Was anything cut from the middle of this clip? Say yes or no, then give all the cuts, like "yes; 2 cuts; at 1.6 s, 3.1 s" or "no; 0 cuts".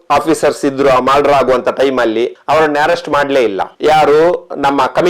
yes; 2 cuts; at 2.3 s, 3.7 s